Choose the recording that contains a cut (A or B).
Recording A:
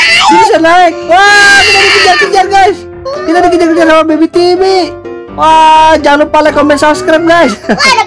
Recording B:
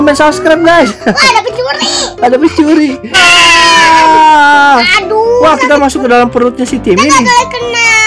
B